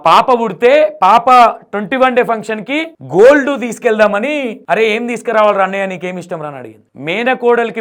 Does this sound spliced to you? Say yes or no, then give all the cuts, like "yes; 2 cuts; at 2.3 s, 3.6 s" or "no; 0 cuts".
no; 0 cuts